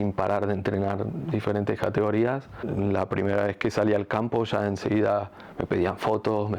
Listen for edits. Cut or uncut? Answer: cut